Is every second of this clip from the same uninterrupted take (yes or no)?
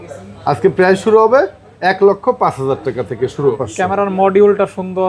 no